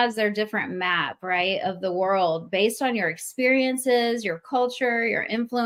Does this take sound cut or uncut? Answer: uncut